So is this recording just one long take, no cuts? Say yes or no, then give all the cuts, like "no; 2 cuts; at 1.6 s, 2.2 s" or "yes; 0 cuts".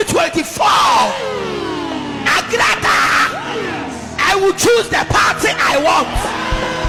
yes; 0 cuts